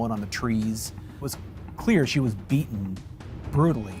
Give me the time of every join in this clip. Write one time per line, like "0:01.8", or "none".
0:01.2